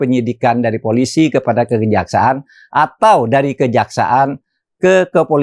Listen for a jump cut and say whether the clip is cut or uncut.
uncut